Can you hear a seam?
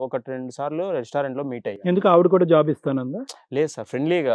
no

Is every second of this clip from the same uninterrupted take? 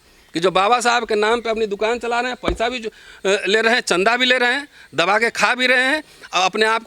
yes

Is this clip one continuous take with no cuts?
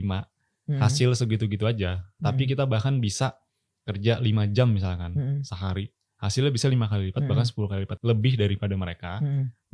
no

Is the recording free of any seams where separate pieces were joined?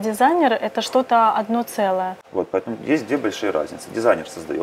yes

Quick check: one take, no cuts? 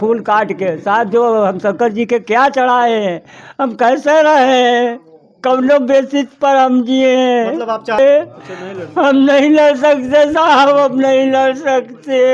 no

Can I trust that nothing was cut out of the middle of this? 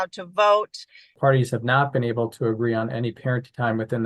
no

